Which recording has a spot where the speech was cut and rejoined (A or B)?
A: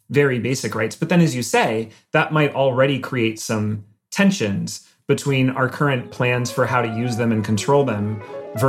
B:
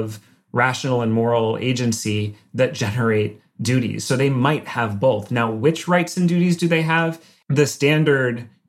B